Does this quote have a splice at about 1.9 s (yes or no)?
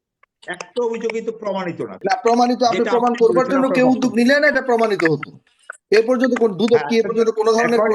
yes